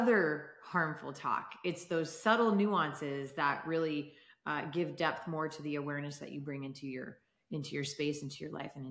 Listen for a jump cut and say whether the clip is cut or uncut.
uncut